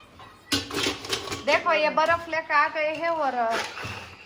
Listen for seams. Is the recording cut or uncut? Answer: uncut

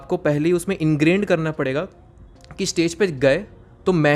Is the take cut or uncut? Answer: uncut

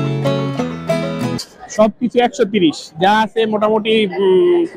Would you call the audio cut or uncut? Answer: cut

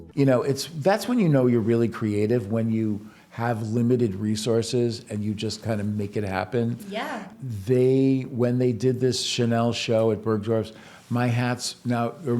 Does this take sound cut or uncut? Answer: cut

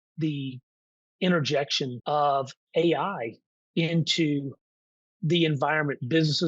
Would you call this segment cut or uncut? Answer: cut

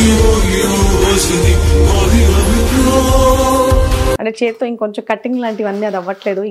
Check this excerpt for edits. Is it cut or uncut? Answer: cut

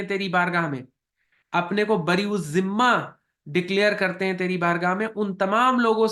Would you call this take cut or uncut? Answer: uncut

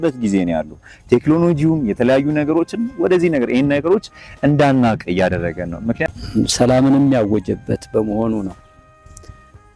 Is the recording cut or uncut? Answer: cut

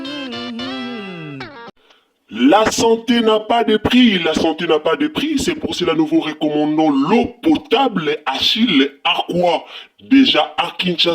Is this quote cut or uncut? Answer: cut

